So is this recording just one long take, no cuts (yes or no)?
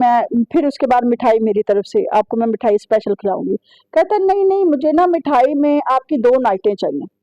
yes